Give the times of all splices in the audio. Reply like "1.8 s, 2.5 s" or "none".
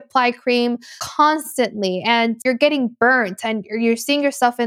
1.0 s, 2.4 s